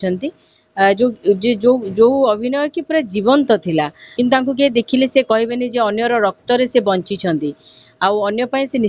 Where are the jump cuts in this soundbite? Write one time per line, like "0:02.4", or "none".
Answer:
0:04.0

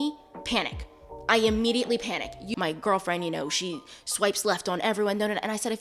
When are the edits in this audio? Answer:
0:02.4

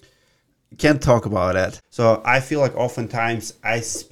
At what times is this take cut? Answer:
0:01.8

